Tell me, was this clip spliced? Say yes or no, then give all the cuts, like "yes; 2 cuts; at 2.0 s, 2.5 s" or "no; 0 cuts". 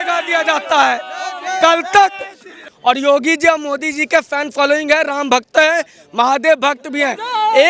yes; 1 cut; at 2.5 s